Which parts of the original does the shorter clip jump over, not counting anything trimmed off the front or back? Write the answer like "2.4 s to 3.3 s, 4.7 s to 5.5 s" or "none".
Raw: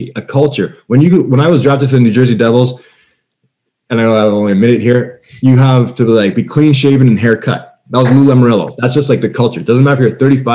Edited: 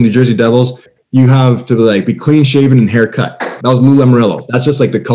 2.9 s to 5.2 s